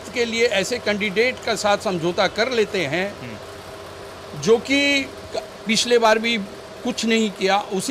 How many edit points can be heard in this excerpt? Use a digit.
0